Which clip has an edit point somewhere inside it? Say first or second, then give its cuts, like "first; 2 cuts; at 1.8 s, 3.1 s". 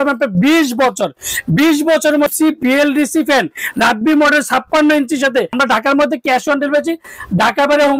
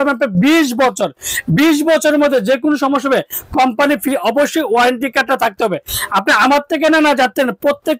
first; 2 cuts; at 2.3 s, 5.5 s